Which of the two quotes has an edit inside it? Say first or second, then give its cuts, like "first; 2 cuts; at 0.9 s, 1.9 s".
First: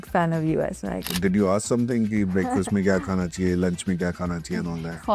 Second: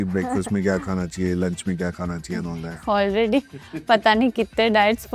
first; 1 cut; at 1.0 s